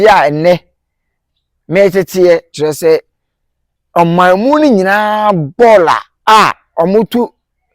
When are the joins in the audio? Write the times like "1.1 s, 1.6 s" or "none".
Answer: 2.5 s, 6.1 s